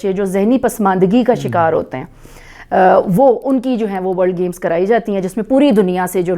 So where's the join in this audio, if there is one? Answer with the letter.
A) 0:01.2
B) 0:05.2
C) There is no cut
C